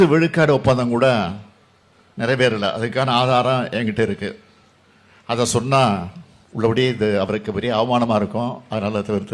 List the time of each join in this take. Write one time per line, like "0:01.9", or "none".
none